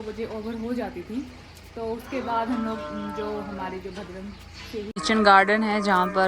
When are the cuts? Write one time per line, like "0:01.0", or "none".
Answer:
0:05.0